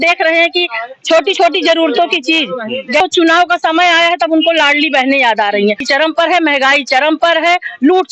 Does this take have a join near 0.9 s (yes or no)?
no